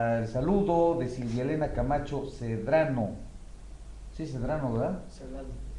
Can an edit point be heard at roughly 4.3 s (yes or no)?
yes